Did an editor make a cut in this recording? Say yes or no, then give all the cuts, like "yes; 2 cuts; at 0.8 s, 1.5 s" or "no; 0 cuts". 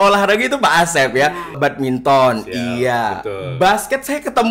yes; 1 cut; at 1.6 s